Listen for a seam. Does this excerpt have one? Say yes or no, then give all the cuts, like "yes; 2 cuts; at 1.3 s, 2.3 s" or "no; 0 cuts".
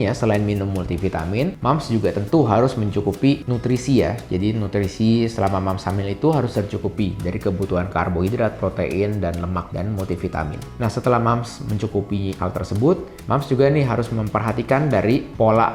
no; 0 cuts